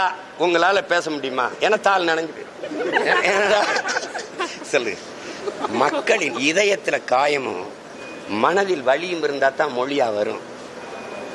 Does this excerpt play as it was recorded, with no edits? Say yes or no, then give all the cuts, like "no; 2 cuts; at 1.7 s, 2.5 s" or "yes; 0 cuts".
yes; 0 cuts